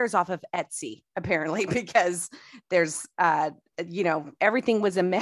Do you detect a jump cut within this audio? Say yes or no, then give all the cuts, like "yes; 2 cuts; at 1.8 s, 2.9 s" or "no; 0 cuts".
no; 0 cuts